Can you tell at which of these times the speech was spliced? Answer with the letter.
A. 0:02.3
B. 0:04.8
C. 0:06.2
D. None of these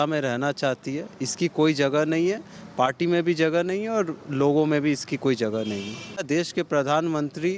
C